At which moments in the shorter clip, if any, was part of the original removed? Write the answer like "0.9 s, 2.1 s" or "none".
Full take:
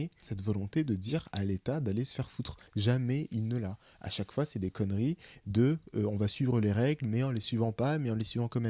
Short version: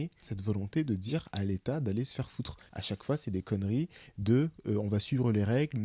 2.6 s

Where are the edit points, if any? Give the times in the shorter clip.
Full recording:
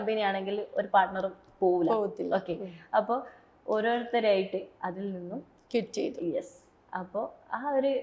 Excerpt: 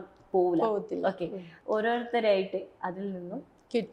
1.4 s

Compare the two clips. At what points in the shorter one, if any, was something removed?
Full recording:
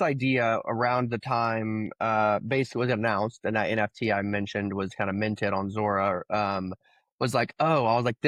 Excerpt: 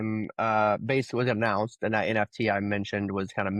none

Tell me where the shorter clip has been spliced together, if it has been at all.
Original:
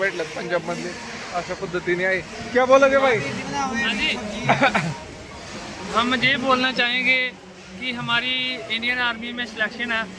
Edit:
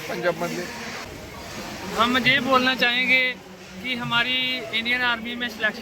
1.0 s

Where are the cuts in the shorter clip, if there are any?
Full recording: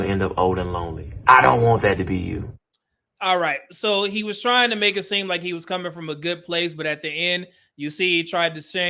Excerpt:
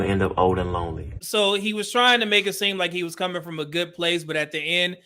1.1 s

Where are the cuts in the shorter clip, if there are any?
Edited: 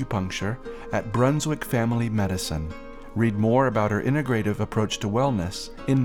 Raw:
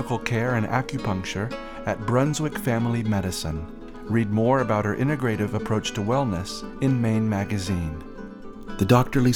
none

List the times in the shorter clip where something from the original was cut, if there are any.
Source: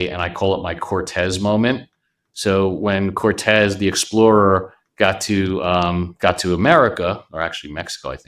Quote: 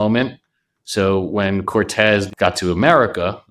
2.3 s

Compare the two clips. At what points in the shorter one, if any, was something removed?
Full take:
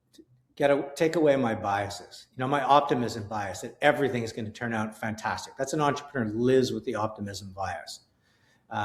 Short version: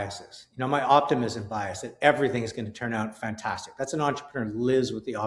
none

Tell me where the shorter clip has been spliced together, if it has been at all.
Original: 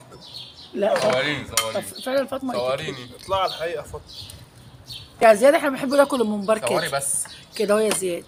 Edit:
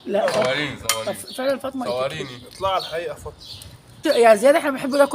4.2 s

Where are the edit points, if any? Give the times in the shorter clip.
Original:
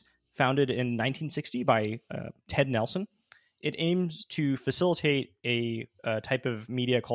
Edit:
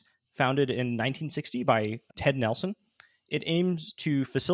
2.1 s

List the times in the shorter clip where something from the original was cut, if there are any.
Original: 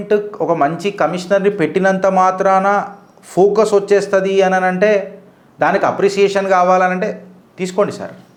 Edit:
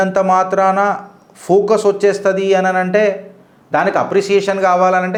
none

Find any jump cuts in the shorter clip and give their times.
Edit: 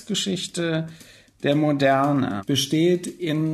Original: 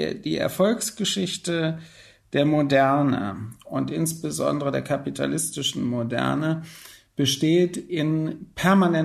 2.4 s

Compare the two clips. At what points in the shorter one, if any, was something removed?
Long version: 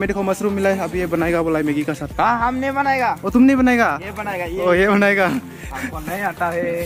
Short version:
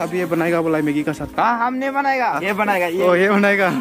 2.4 s

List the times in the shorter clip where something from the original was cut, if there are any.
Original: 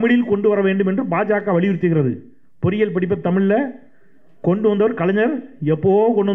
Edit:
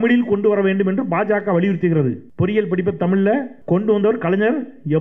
2.2 s, 3.5 s

